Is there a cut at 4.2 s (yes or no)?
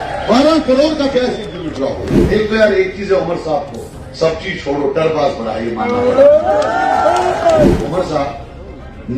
no